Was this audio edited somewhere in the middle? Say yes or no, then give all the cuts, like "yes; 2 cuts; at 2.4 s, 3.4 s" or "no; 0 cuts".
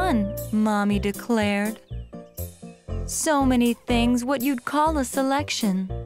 no; 0 cuts